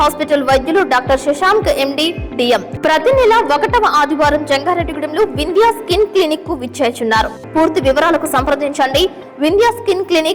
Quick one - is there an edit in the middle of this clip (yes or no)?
yes